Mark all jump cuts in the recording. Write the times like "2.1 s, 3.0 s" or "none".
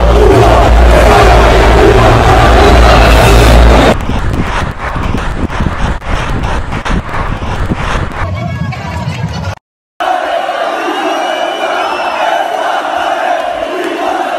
none